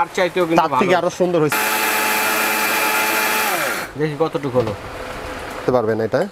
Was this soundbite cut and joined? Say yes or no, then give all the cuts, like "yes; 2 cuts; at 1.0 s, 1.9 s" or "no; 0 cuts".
yes; 2 cuts; at 1.5 s, 5.6 s